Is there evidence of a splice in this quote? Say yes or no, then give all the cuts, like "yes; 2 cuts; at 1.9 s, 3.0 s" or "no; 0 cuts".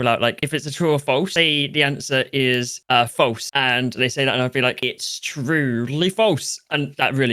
no; 0 cuts